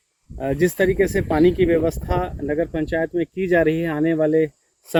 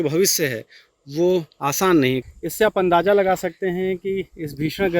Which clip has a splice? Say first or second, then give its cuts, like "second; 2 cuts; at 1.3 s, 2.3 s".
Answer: second; 1 cut; at 2.3 s